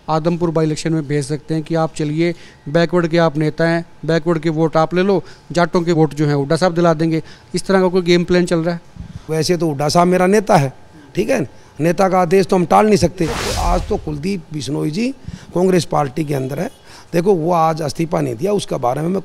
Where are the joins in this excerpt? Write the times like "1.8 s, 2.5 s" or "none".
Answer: 6.0 s, 9.2 s, 13.5 s